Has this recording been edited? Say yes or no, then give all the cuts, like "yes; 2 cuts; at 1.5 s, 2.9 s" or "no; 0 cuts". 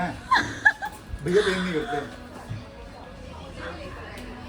no; 0 cuts